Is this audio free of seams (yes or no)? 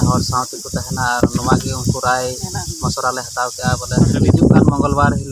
no